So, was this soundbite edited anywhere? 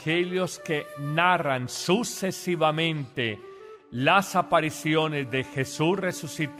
no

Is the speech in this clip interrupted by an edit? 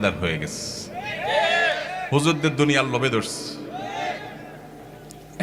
no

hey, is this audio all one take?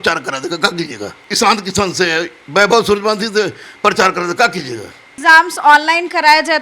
no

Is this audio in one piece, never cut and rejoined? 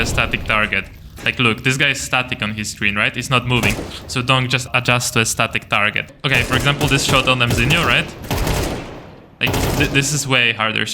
no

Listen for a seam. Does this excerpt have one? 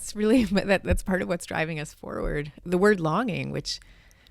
yes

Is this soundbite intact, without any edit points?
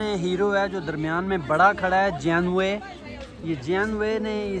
yes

